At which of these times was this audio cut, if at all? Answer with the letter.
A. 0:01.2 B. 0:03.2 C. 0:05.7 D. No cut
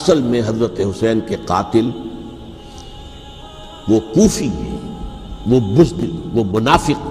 D